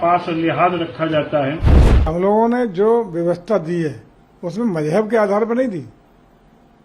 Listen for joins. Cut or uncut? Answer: cut